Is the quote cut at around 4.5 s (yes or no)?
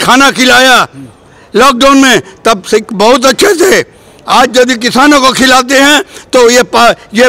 no